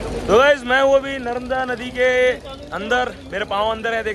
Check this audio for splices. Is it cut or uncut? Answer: uncut